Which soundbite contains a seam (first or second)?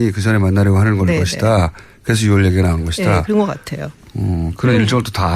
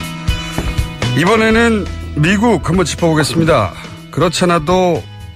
first